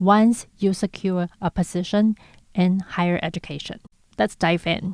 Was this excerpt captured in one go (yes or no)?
no